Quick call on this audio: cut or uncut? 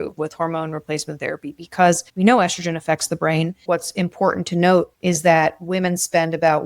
cut